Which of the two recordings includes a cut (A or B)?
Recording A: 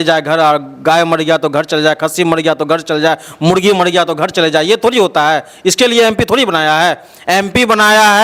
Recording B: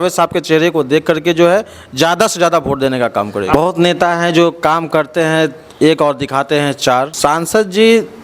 B